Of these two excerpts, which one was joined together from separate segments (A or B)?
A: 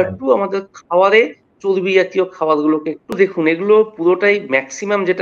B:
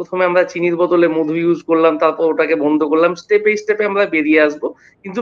A